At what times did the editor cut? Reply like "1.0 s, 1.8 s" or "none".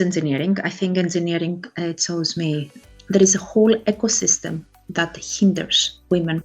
2.8 s